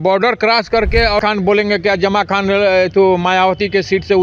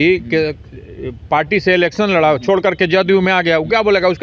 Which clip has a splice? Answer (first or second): first